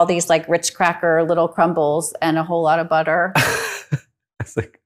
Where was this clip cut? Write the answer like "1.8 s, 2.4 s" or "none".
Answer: none

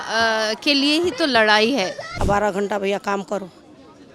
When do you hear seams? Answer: 2.1 s

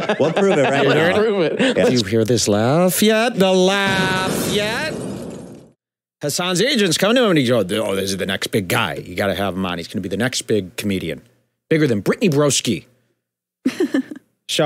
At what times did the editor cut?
5.6 s

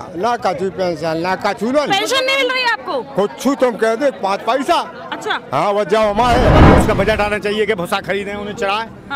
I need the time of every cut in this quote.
6.6 s

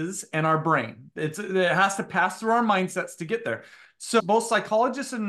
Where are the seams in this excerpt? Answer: 4.2 s

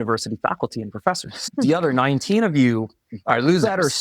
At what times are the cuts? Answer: 1.3 s

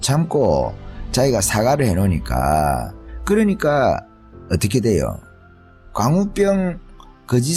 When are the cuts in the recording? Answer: none

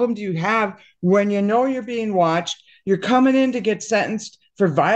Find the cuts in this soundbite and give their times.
none

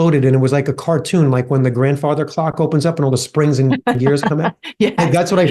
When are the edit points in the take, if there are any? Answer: none

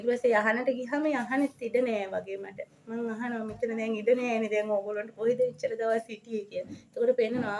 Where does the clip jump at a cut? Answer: none

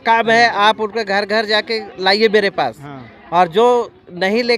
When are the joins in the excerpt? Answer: none

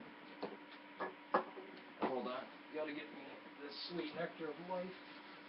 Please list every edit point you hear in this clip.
2.6 s

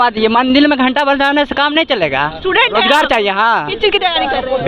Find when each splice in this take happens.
none

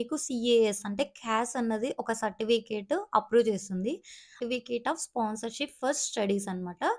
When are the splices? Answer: 4.4 s

